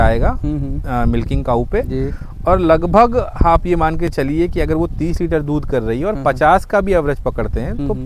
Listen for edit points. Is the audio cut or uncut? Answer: uncut